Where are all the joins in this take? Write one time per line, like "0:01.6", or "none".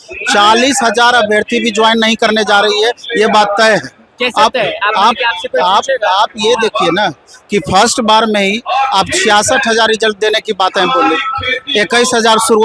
none